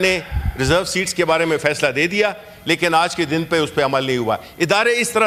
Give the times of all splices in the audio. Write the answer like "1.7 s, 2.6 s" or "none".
none